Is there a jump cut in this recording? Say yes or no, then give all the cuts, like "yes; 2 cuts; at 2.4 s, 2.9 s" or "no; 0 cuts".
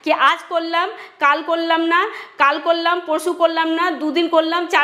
no; 0 cuts